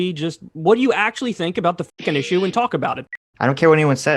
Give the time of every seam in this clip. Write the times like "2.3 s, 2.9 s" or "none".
3.0 s